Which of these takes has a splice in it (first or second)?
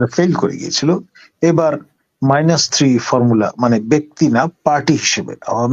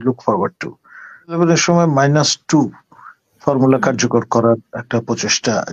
second